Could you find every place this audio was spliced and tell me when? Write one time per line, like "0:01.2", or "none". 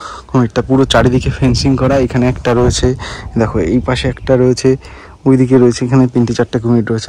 none